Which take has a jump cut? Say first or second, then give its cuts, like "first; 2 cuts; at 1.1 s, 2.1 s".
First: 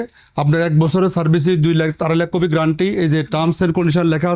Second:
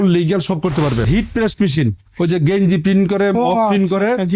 second; 1 cut; at 1.1 s